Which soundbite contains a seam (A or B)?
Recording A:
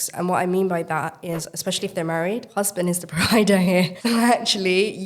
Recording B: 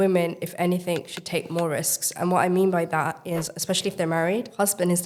A